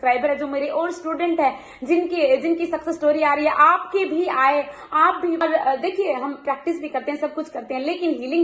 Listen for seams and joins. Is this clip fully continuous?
no; 1 cut; at 5.4 s

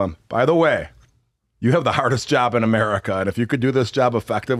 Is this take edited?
no; 0 cuts

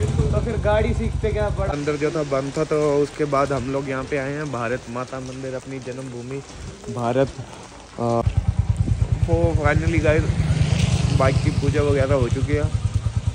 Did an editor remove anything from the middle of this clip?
yes; 2 cuts; at 1.7 s, 8.2 s

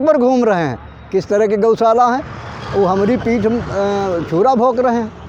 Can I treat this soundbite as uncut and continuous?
yes; 0 cuts

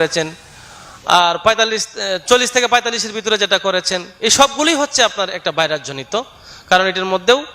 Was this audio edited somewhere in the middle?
no; 0 cuts

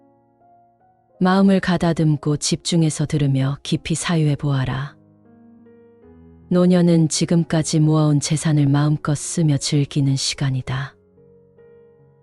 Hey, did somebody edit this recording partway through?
yes; 3 cuts; at 0.9 s, 4.9 s, 6.4 s

